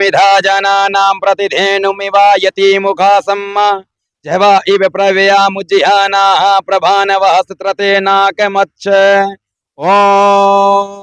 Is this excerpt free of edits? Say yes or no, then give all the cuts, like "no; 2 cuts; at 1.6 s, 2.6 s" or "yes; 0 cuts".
yes; 0 cuts